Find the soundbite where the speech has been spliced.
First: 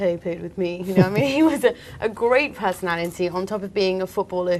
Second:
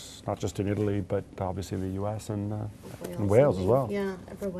second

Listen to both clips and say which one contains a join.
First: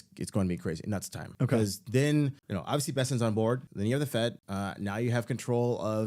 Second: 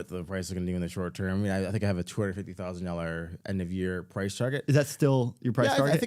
first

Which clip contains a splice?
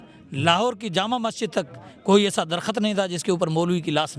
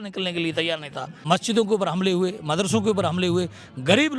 second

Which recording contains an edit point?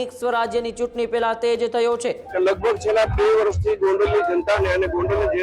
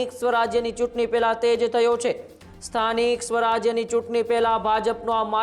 first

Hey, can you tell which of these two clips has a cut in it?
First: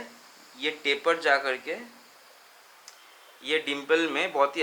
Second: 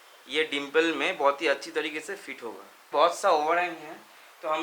second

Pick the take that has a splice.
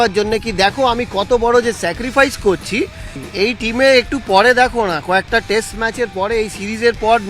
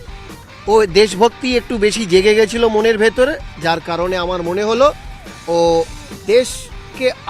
first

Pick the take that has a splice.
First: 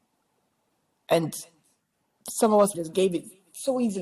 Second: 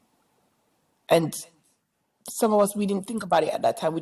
first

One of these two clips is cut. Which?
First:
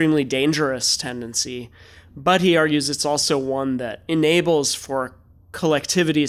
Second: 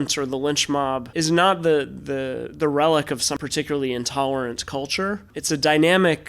second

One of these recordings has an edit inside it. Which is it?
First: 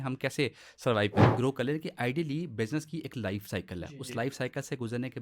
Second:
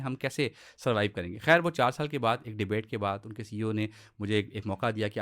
first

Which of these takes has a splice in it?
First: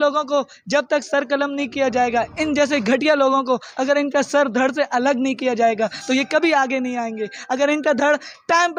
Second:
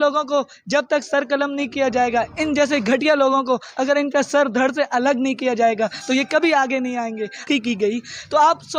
second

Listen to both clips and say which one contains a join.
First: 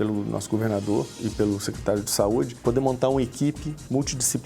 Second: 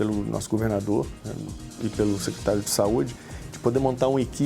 first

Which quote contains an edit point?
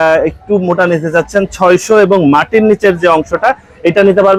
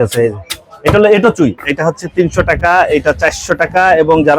second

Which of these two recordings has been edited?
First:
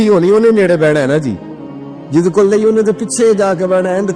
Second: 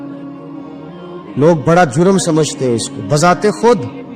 second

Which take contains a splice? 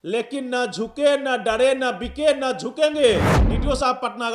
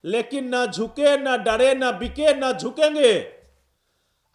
first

